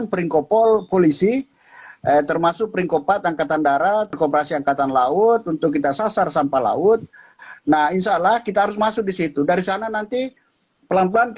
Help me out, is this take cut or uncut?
cut